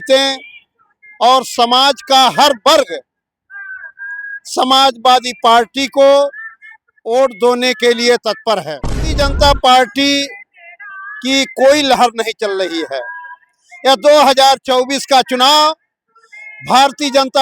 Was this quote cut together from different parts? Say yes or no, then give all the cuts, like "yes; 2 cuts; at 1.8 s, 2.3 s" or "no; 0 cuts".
yes; 1 cut; at 9.1 s